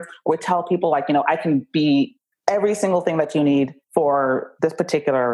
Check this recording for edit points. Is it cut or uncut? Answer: cut